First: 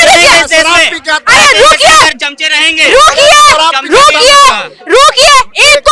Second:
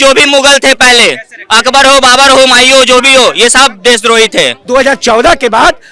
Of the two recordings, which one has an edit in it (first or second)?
second